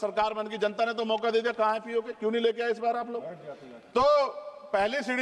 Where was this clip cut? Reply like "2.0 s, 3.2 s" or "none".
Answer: none